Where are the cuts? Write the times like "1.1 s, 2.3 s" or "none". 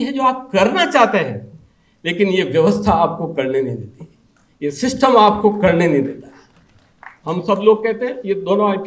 none